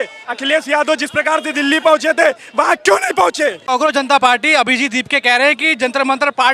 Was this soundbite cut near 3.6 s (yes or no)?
yes